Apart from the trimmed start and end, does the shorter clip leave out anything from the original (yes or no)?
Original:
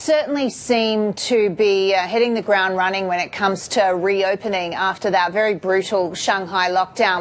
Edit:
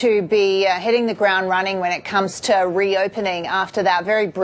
no